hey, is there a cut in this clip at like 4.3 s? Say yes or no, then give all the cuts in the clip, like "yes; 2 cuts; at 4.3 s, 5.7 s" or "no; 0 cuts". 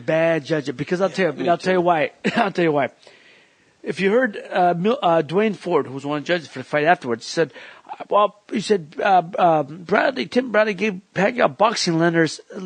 no; 0 cuts